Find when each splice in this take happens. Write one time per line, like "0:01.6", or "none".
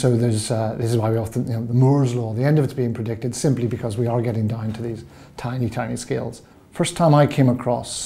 0:06.6